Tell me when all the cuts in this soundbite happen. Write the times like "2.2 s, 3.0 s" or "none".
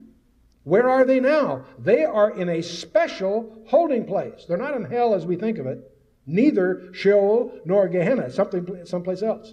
none